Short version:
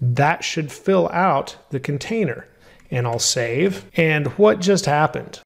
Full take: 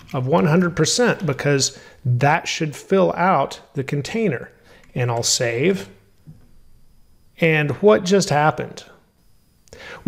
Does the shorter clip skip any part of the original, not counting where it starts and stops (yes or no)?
yes